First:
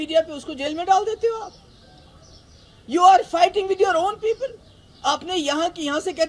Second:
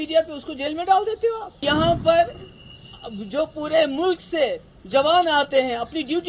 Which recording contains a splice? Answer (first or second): second